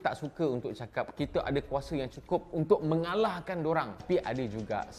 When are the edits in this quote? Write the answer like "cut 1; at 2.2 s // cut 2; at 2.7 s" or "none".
cut 1; at 4.0 s